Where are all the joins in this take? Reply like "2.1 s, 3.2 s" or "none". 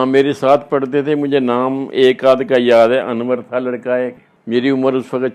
4.2 s